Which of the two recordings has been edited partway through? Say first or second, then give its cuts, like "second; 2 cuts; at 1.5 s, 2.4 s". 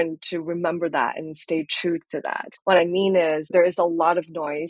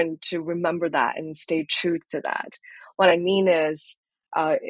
first; 2 cuts; at 2.5 s, 3.5 s